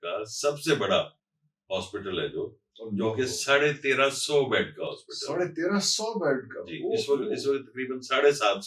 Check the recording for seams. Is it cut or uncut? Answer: uncut